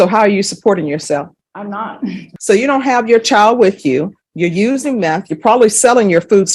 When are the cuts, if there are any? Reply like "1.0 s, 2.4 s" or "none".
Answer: 2.3 s

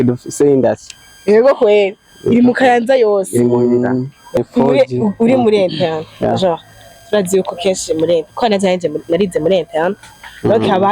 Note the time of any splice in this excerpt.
4.3 s

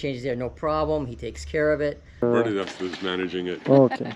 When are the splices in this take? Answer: 2.2 s

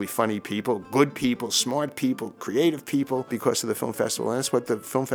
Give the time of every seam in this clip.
3.3 s

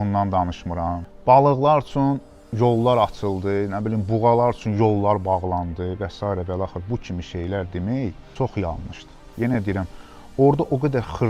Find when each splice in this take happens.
1.1 s, 8.2 s, 9.2 s

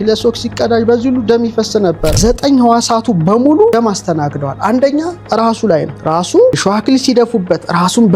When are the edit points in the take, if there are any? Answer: 2.2 s, 3.7 s, 5.9 s, 6.6 s

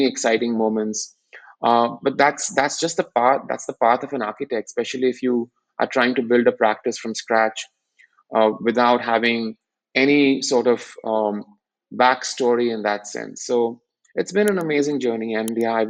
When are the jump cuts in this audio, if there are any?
none

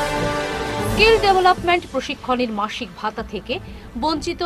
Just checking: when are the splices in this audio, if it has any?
1.0 s

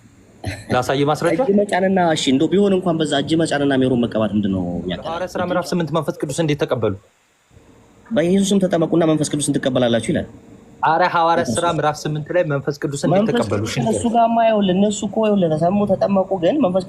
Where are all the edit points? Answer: 5.2 s

